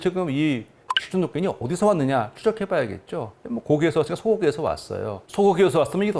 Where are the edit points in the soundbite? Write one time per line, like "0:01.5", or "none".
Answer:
none

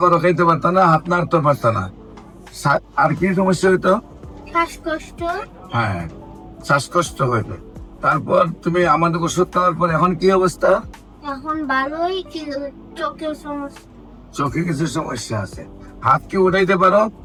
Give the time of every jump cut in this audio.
none

